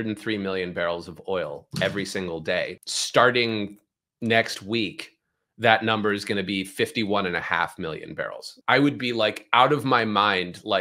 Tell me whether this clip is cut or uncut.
cut